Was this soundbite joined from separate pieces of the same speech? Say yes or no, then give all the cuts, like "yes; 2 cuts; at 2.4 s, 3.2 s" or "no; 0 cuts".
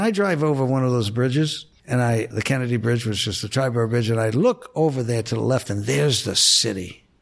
yes; 1 cut; at 2.3 s